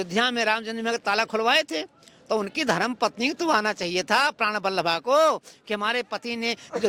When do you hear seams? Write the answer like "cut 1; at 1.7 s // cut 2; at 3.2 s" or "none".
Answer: none